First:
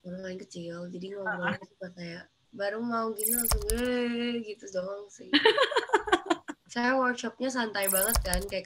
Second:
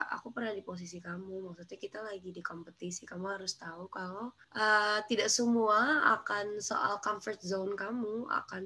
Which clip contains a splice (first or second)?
first